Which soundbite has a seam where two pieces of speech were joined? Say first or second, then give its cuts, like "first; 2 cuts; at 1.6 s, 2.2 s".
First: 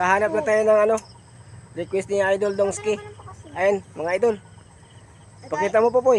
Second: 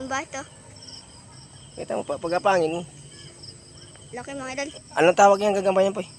second; 1 cut; at 4.8 s